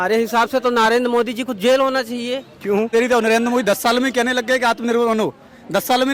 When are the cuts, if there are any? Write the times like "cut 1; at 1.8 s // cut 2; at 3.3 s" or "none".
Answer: cut 1; at 2.9 s